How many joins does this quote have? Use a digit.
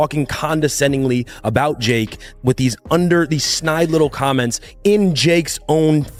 0